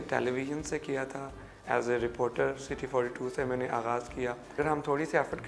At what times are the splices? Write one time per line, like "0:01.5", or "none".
0:04.6

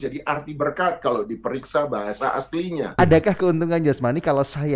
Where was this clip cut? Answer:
0:02.9

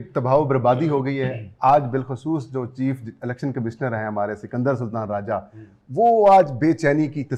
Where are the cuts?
none

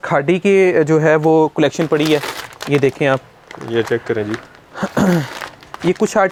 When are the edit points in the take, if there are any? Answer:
none

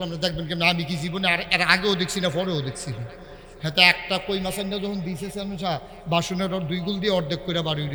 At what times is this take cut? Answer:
none

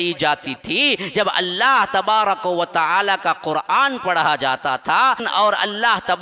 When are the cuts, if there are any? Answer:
0:05.2

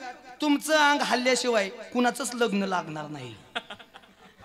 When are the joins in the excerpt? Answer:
none

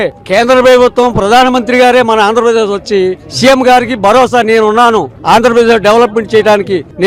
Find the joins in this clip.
none

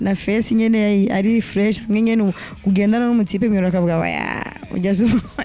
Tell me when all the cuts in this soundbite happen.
none

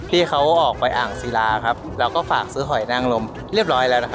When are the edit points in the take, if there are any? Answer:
0:01.9

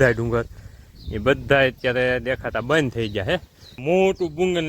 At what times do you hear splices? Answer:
0:03.8

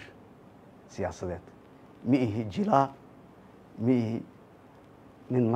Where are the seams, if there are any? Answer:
0:01.2

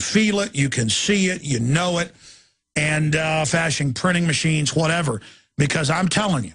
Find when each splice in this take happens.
none

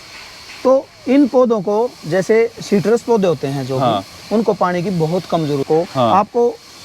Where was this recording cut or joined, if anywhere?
0:05.6

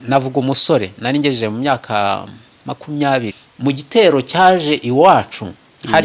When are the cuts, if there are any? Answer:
0:03.4

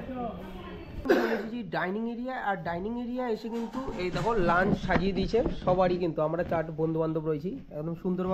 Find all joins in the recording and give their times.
0:01.1

